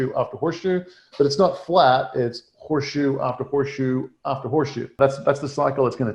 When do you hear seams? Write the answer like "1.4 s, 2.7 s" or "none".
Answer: 5.0 s